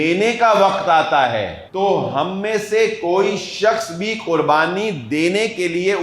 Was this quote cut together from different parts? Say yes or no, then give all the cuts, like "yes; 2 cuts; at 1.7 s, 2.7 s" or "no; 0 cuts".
yes; 1 cut; at 1.6 s